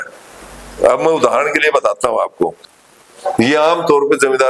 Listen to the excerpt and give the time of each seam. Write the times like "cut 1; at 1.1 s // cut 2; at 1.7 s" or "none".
cut 1; at 2.7 s